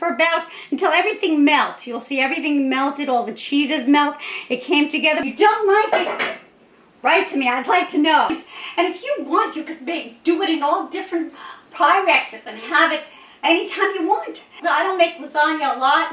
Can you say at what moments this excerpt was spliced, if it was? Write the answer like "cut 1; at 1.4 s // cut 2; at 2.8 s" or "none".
cut 1; at 5.3 s // cut 2; at 8.3 s // cut 3; at 14.6 s